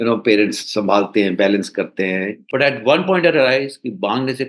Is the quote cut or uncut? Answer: cut